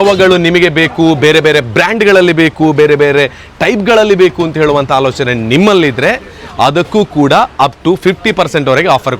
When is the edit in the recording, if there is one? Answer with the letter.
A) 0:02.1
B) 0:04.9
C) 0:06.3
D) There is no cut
D